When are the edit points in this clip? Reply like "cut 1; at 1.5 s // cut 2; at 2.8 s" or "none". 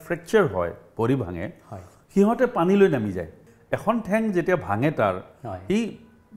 cut 1; at 3.4 s